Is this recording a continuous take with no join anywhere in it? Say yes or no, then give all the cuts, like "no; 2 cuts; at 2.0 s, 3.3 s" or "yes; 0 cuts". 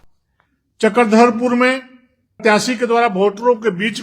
no; 1 cut; at 2.3 s